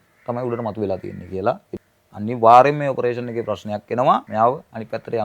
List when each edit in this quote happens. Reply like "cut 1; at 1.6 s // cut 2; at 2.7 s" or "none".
cut 1; at 1.7 s // cut 2; at 4.3 s